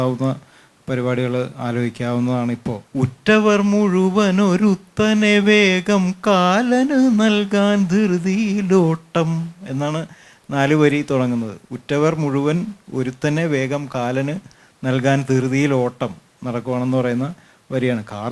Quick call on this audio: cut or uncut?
cut